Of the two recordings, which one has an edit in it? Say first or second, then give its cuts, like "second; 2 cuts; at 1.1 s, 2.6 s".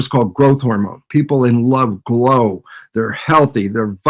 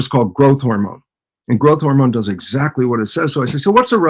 first; 1 cut; at 1.0 s